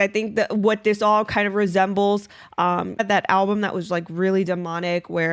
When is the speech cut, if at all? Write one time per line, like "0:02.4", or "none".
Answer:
0:03.0